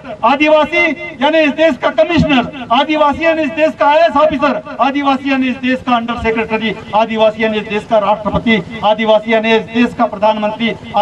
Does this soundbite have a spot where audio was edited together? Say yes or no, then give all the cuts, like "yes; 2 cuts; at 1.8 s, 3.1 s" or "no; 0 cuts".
no; 0 cuts